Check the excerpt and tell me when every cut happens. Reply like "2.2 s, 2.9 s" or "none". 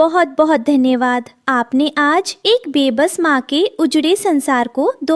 none

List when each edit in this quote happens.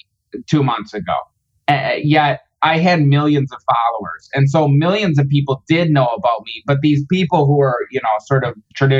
none

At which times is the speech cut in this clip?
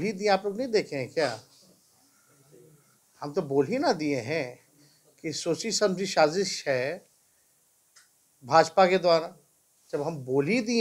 none

